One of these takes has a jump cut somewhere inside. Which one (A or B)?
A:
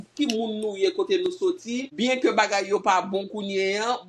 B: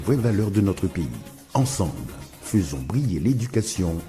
A